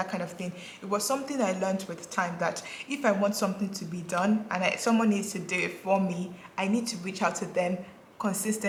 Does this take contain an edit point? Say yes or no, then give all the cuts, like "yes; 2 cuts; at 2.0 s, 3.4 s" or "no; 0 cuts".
no; 0 cuts